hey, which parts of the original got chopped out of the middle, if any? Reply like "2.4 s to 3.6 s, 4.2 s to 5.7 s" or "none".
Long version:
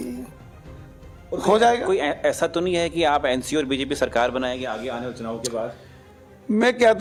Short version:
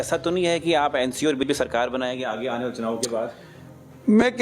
3.8 s to 3.9 s